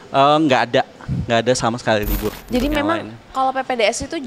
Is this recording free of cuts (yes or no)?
no